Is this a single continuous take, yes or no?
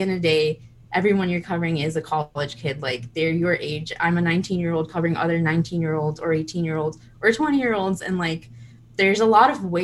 yes